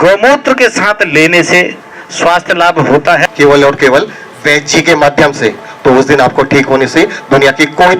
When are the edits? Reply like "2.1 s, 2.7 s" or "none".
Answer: 3.3 s

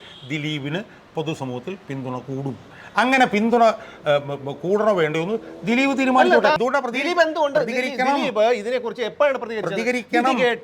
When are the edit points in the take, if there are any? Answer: 6.6 s

